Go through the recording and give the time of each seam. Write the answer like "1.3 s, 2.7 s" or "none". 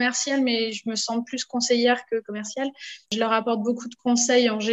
3.1 s